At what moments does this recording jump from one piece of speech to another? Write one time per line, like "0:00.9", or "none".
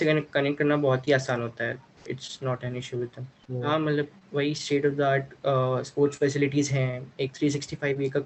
0:03.4